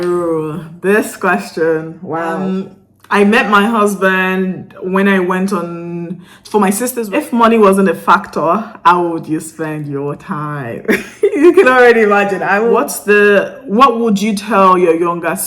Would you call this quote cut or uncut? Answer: cut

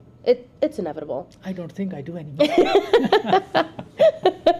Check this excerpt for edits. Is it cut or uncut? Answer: uncut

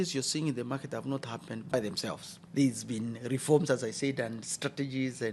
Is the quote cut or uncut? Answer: uncut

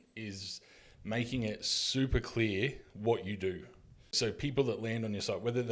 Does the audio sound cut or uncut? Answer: cut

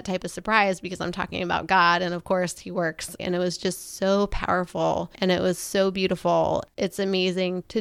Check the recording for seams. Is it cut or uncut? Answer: cut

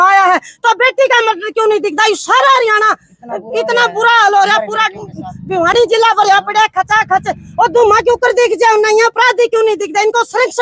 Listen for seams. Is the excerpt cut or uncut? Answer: uncut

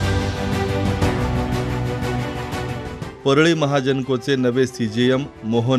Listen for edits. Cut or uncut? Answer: cut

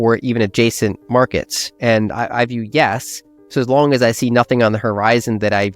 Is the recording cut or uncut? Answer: cut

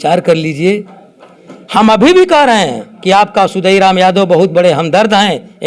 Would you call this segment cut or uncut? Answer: uncut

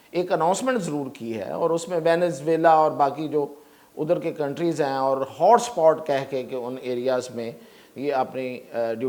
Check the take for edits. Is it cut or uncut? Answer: uncut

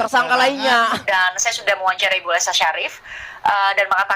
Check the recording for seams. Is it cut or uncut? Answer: cut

